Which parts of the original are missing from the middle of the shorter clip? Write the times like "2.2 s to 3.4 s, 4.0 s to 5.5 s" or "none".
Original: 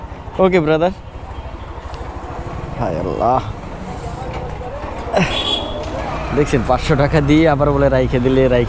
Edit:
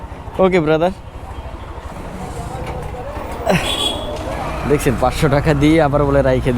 1.9 s to 3.6 s